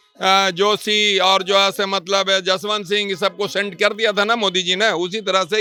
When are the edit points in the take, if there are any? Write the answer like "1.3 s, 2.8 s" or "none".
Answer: none

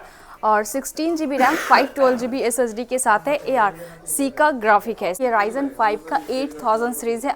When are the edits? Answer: 5.2 s

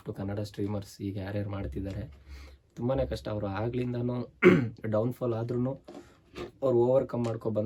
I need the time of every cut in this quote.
none

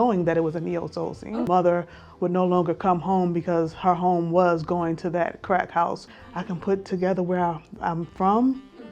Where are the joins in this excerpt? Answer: 1.3 s, 6.2 s

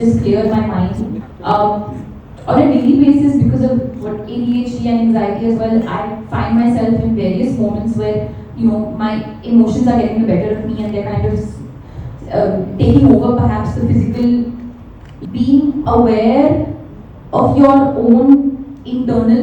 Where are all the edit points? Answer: 1.3 s, 15.1 s

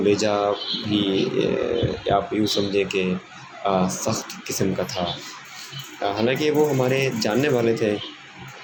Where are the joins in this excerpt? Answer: none

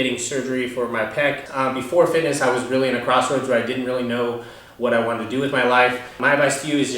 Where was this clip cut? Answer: 1.5 s, 6.2 s

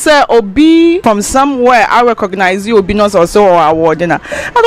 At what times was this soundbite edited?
1.0 s

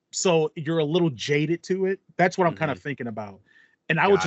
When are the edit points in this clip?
none

